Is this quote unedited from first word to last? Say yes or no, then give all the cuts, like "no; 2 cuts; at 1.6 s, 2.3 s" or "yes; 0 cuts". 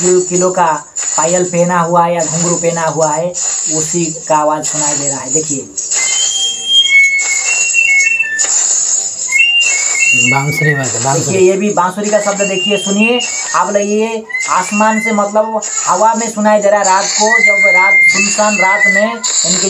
yes; 0 cuts